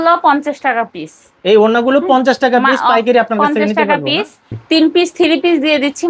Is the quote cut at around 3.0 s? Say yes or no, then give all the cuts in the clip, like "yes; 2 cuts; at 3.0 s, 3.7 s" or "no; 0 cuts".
no; 1 cut; at 4.4 s